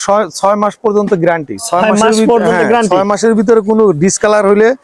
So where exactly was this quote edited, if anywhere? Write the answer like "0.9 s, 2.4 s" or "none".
none